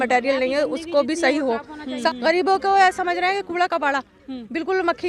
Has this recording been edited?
yes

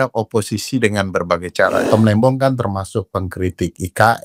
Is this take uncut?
no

